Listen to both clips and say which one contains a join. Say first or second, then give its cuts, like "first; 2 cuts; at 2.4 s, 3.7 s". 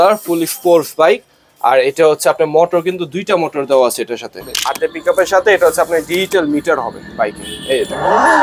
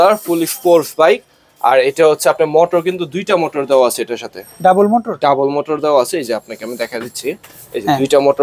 first; 1 cut; at 4.4 s